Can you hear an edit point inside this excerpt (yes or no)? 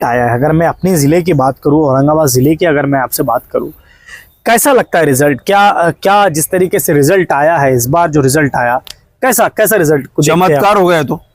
no